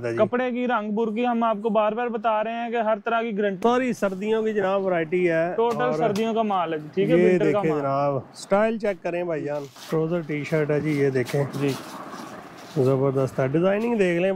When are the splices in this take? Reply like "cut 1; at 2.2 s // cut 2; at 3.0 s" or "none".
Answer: cut 1; at 3.6 s // cut 2; at 9.7 s // cut 3; at 12.2 s